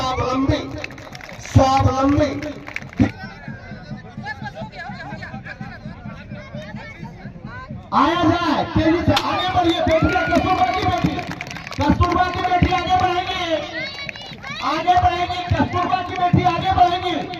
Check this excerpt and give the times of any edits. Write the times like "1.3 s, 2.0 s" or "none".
3.1 s